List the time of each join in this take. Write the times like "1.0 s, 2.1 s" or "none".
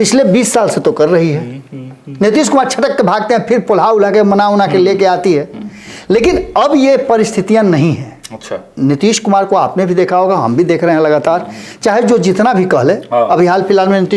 none